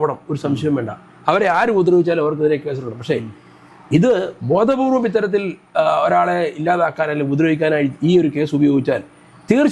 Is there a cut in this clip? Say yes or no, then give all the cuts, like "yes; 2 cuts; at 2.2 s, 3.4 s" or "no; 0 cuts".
no; 0 cuts